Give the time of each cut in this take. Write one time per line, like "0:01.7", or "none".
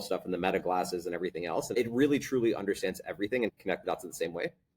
0:01.8
0:03.6